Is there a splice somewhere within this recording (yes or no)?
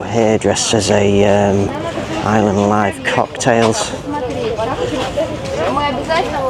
no